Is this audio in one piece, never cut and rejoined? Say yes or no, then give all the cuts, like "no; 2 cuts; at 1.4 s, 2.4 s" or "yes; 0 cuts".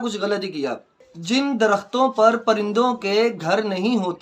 no; 1 cut; at 1.0 s